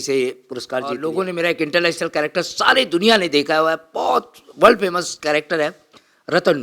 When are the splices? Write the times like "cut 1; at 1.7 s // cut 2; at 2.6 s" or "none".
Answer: cut 1; at 1.0 s